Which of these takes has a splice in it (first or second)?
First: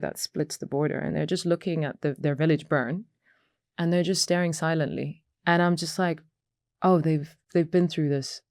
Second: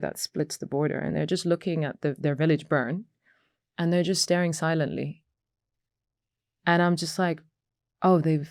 first